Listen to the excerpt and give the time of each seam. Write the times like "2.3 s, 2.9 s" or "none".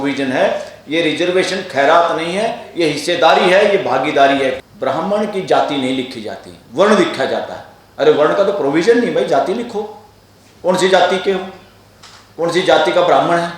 4.6 s